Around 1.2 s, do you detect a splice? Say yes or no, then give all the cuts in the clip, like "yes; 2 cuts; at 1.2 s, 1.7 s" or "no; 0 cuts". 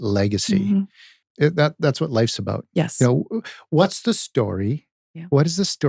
yes; 1 cut; at 1.2 s